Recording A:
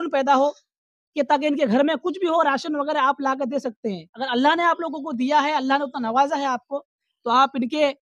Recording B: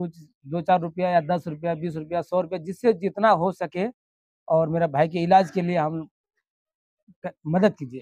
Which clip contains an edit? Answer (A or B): A